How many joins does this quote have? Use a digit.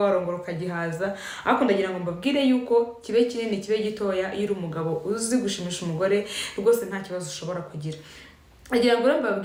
0